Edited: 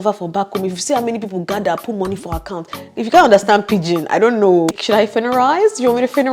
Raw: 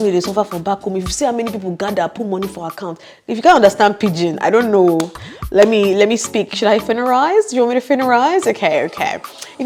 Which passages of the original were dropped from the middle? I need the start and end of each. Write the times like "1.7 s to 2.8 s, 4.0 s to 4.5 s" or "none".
5.1 s to 6.5 s

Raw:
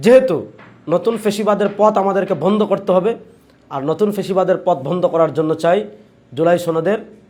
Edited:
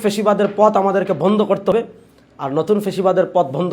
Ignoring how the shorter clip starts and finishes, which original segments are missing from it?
2.9 s to 3.0 s

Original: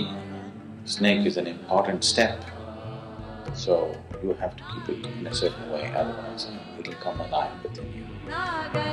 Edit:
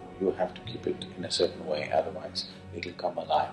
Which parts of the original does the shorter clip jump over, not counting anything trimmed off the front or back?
none

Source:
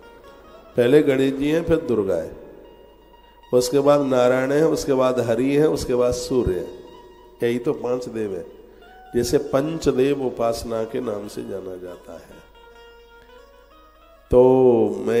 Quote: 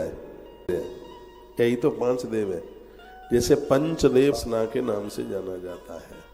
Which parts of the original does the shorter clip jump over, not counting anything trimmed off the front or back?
2.9 s to 6.5 s, 10.2 s to 10.5 s

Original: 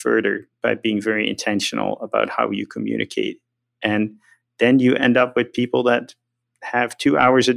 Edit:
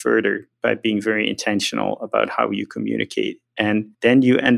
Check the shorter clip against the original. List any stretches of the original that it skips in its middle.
3.7 s to 4.2 s

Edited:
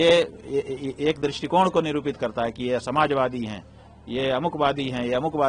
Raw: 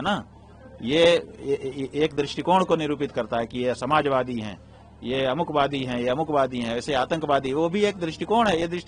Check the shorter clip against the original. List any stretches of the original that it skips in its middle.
none

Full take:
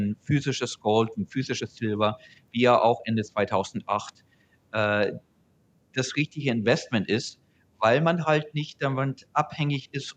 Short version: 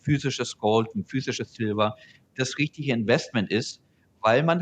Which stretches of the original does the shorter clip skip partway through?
2.3 s to 5.7 s

